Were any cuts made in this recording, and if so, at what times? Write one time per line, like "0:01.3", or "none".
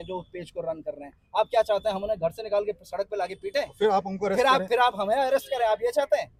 none